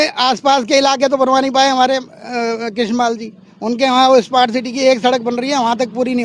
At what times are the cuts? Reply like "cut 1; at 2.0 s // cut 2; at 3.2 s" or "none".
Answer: none